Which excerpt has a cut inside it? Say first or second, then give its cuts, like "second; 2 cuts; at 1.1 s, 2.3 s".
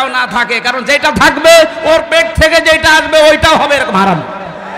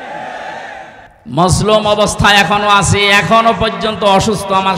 second; 1 cut; at 1.1 s